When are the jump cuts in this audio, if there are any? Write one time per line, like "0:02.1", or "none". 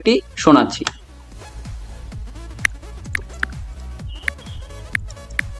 0:01.3